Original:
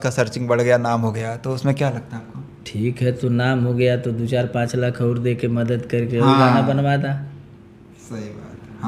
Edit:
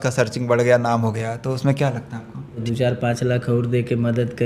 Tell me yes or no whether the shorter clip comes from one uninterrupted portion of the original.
no